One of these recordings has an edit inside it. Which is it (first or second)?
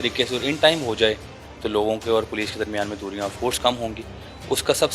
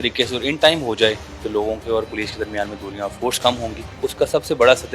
second